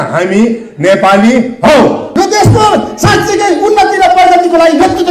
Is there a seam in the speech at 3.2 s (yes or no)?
no